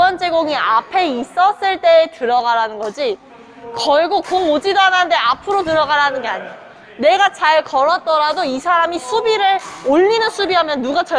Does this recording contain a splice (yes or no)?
no